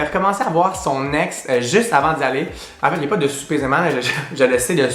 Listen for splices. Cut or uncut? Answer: uncut